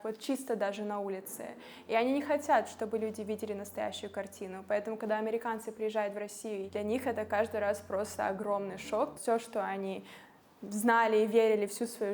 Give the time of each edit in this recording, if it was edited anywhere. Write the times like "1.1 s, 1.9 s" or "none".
6.6 s, 9.2 s